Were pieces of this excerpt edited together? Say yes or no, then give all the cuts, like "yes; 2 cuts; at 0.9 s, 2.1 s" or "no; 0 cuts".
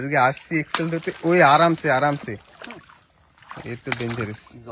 no; 0 cuts